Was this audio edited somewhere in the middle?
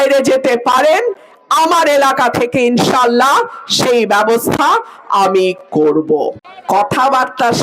yes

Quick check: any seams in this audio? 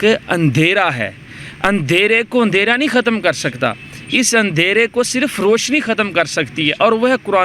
no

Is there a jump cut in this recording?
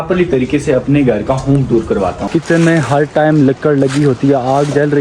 yes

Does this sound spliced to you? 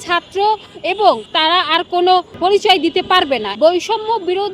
yes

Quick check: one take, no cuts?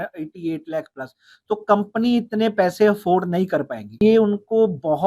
no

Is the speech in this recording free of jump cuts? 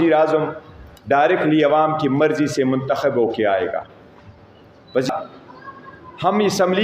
no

